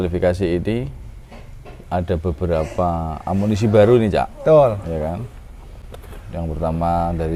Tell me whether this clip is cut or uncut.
uncut